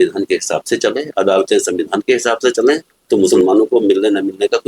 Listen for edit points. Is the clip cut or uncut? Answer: cut